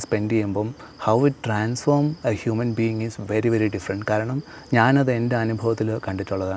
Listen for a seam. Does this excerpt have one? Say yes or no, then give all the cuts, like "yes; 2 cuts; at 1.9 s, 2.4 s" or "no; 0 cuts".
no; 0 cuts